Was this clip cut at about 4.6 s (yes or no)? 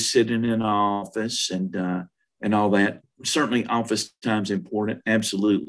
no